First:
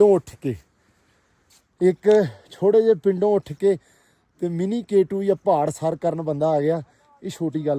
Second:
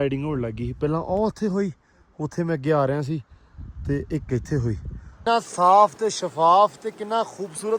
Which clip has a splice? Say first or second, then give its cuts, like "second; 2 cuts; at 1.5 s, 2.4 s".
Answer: second; 1 cut; at 5.1 s